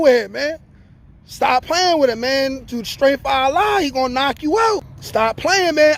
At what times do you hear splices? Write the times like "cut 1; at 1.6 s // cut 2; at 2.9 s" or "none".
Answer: cut 1; at 5.0 s